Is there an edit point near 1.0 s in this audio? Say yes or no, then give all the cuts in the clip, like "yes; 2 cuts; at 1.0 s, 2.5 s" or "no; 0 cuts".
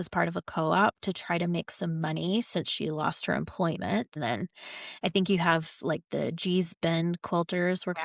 no; 1 cut; at 4.1 s